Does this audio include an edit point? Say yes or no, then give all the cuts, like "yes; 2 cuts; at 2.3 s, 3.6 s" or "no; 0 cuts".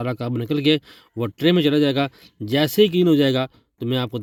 no; 0 cuts